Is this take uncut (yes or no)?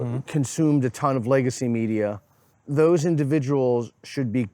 no